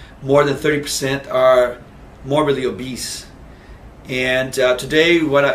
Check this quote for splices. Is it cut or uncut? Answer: cut